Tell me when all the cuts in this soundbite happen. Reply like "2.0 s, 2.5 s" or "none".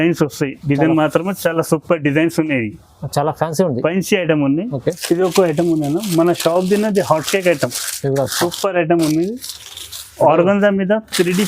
5.0 s